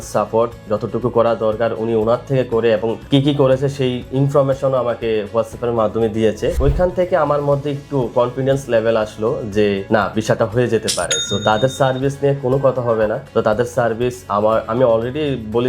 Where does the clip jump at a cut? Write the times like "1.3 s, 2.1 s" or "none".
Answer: 3.0 s, 6.6 s, 9.8 s, 13.2 s